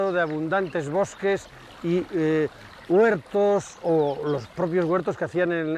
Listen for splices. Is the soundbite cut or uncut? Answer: cut